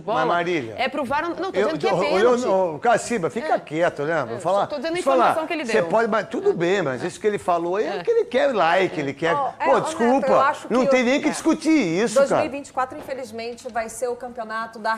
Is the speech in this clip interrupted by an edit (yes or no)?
no